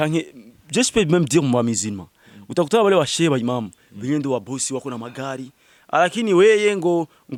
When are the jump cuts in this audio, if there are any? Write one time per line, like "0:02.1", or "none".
none